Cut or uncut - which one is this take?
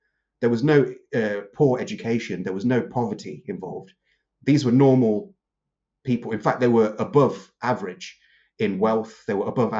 uncut